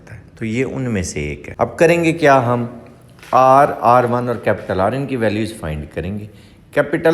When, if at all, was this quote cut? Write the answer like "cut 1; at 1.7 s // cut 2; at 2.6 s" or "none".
cut 1; at 1.4 s